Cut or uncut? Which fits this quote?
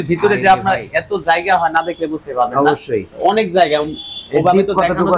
uncut